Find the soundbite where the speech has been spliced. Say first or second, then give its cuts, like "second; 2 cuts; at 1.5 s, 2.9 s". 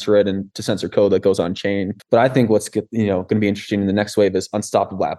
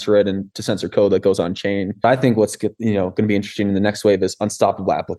second; 1 cut; at 2.0 s